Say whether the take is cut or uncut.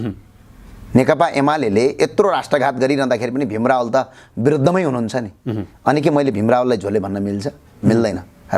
uncut